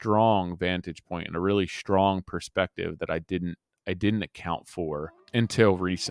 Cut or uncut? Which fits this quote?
cut